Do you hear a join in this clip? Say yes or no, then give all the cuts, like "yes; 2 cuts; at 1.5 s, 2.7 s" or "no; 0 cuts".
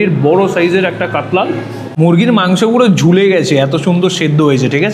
yes; 1 cut; at 1.9 s